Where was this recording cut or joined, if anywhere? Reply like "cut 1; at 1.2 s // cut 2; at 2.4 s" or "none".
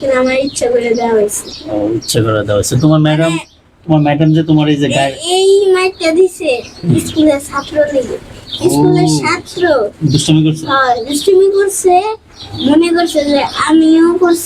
none